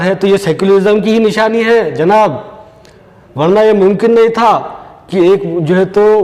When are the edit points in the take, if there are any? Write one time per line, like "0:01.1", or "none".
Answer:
none